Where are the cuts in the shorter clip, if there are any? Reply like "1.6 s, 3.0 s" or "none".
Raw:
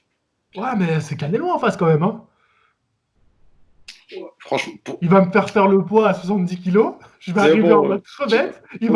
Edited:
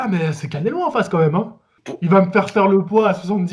1.8 s